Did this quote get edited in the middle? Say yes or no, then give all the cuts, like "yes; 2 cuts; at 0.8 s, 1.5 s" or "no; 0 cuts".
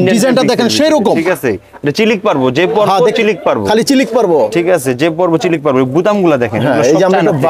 no; 0 cuts